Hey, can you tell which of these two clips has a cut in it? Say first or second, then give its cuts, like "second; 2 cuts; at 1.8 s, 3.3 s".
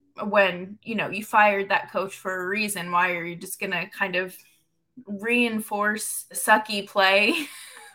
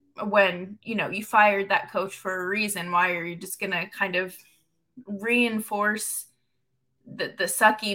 first; 1 cut; at 6.4 s